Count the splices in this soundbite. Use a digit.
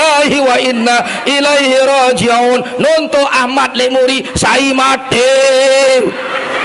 0